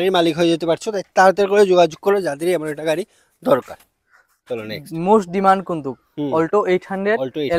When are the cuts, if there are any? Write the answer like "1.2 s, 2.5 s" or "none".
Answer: none